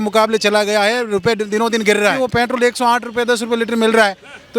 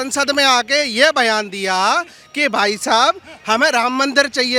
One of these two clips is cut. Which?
first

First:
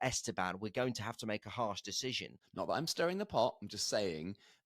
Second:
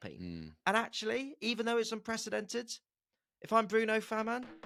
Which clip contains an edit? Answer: first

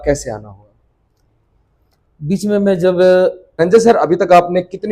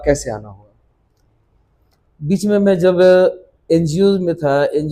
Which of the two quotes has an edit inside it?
first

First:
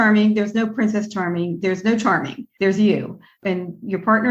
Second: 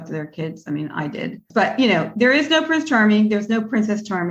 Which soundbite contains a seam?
first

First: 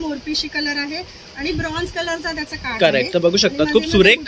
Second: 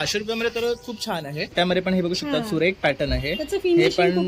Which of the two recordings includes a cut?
second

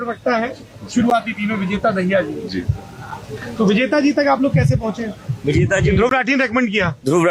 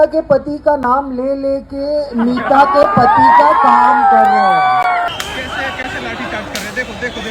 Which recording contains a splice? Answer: second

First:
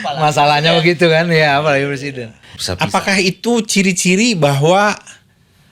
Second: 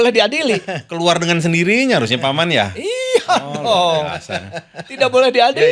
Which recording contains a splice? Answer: first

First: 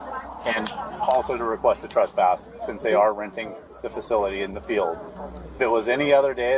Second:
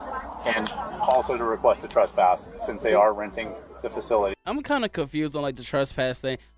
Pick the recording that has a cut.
first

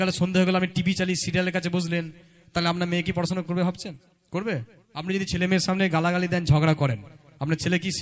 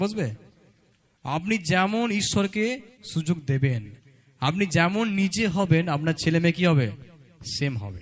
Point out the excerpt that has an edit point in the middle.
first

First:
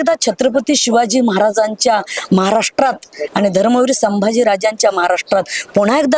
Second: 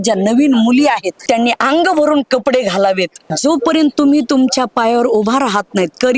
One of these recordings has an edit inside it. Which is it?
second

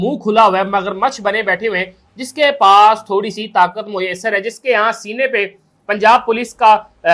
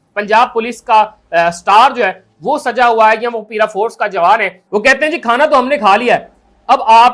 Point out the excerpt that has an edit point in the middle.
second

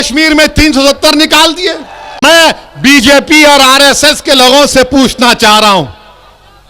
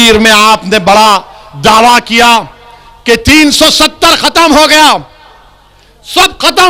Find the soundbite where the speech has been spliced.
first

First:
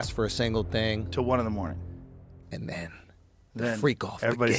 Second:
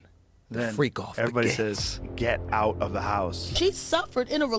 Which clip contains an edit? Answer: second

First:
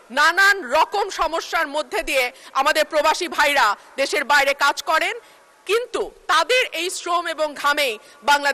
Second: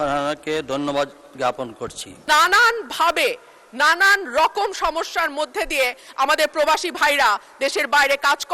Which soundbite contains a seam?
second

